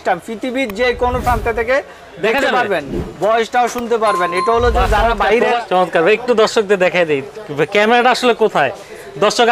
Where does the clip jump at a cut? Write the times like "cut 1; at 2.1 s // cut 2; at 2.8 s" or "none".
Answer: cut 1; at 5.6 s

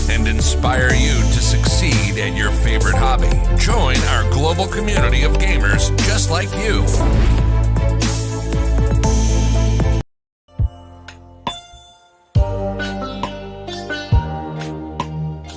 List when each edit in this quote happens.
cut 1; at 10.0 s

